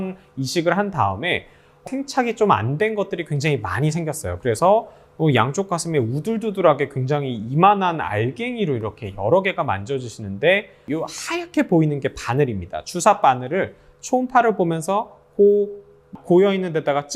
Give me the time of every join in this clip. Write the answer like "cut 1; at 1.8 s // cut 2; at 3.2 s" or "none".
cut 1; at 1.8 s // cut 2; at 10.8 s // cut 3; at 16.1 s